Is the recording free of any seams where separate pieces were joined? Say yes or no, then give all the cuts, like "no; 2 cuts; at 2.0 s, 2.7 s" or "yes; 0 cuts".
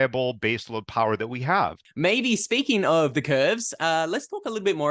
no; 1 cut; at 1.8 s